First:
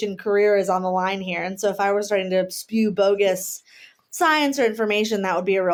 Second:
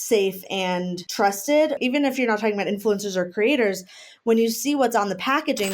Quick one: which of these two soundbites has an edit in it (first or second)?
second